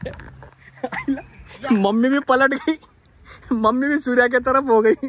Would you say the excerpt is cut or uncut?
uncut